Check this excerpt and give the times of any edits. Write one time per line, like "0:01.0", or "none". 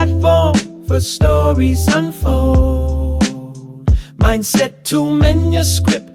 none